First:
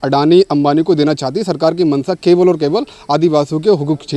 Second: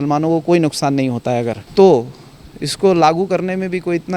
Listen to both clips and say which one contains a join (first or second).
second